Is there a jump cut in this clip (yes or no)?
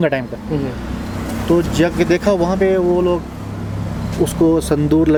no